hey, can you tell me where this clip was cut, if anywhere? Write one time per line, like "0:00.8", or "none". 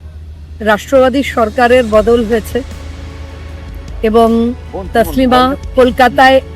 0:05.6